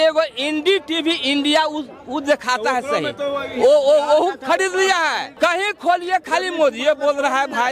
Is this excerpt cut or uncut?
cut